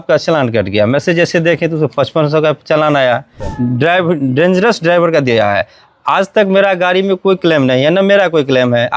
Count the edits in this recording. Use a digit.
1